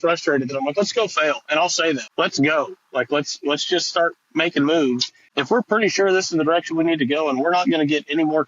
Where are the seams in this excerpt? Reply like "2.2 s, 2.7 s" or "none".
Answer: 2.1 s, 5.1 s